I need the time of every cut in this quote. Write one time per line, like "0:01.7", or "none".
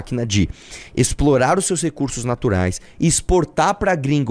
none